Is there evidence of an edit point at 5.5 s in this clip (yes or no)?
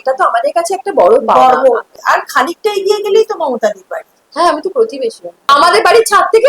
yes